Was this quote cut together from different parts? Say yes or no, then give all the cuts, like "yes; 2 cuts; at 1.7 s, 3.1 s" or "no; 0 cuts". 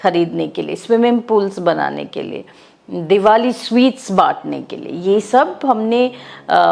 no; 0 cuts